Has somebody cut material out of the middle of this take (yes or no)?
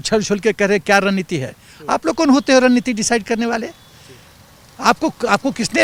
no